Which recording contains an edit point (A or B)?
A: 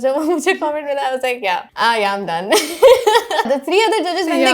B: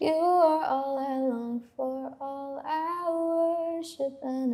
A